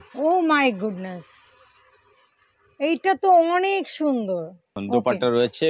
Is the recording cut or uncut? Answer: cut